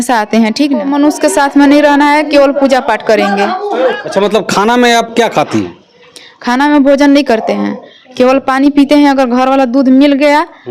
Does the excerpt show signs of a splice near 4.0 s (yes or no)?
yes